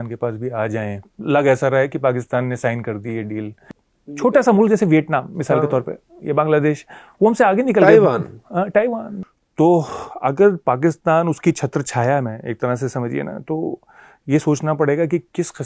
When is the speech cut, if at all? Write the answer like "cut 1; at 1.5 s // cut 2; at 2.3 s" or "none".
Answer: cut 1; at 1.1 s // cut 2; at 3.7 s // cut 3; at 9.2 s

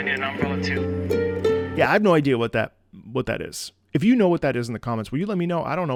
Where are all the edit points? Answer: none

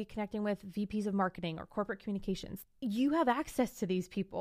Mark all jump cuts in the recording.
cut 1; at 2.5 s

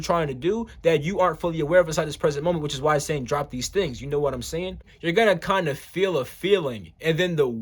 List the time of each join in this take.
cut 1; at 4.9 s

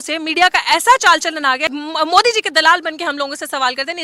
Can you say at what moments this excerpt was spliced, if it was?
cut 1; at 1.7 s

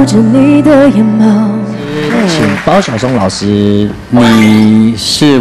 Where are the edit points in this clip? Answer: cut 1; at 2.0 s

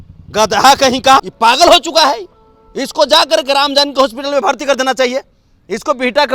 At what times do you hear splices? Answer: cut 1; at 1.3 s

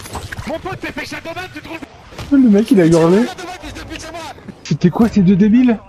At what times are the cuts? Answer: cut 1; at 2.0 s // cut 2; at 4.6 s

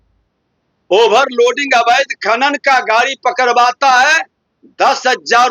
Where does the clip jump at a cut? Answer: none

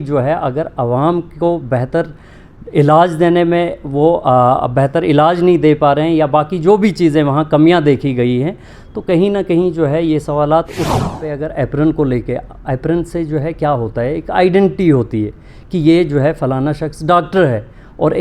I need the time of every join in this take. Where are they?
cut 1; at 11.0 s

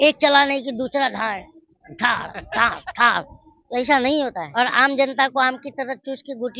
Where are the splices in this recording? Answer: cut 1; at 4.4 s

